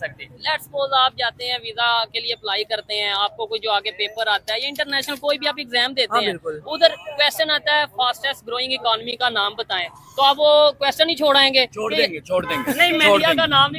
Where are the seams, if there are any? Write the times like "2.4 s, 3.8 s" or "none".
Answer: none